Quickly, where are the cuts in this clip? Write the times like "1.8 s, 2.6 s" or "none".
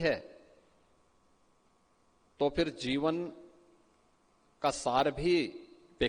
none